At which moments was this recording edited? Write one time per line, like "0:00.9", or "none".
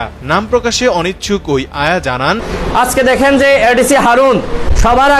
0:02.5